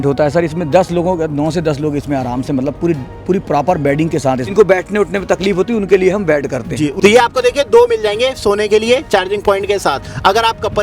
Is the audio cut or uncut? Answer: cut